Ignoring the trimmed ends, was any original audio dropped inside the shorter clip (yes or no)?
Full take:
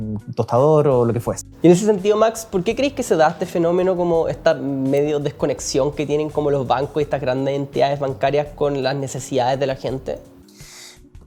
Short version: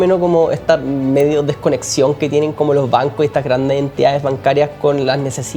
no